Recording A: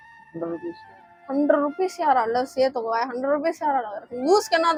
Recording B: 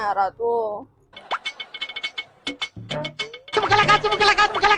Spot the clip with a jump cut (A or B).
B